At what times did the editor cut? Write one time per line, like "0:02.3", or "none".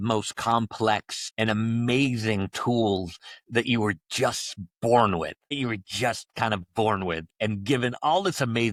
none